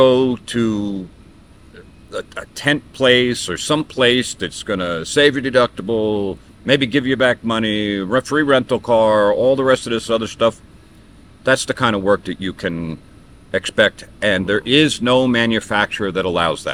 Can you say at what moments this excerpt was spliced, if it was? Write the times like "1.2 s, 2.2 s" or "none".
none